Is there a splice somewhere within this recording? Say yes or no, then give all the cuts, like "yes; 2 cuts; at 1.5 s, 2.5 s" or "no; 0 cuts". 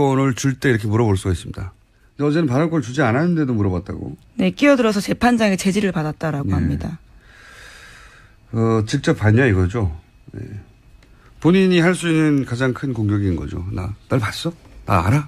yes; 1 cut; at 5.7 s